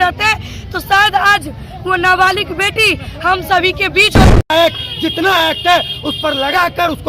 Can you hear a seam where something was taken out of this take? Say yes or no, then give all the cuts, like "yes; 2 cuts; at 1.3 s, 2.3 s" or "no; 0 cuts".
yes; 1 cut; at 4.5 s